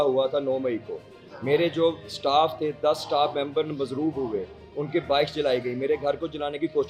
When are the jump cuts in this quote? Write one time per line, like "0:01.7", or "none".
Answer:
none